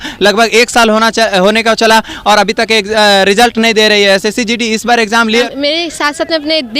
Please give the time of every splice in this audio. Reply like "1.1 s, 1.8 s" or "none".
5.4 s